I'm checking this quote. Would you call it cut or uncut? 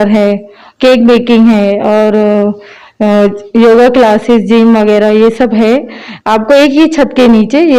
uncut